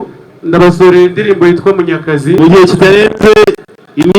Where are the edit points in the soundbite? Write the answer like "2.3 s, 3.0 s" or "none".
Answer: 2.4 s

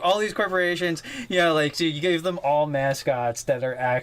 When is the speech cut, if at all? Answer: 1.1 s

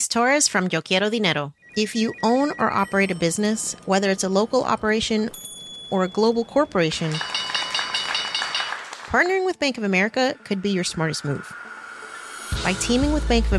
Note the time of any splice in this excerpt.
1.6 s

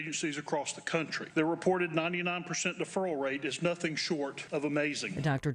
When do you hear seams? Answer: 1.2 s, 4.4 s

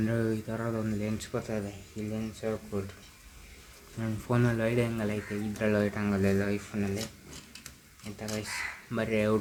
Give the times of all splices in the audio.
none

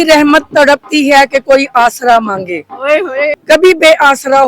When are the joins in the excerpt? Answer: 3.3 s

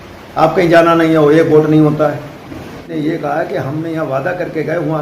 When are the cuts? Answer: 2.9 s

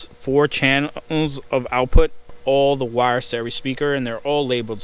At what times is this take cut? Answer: 2.4 s

